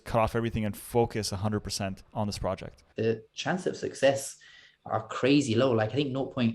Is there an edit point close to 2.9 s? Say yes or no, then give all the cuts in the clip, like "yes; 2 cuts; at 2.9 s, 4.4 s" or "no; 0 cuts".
yes; 1 cut; at 2.9 s